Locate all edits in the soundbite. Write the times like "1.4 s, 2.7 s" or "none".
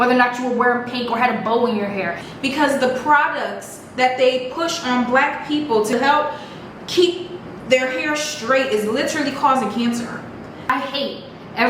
2.2 s, 5.9 s, 10.7 s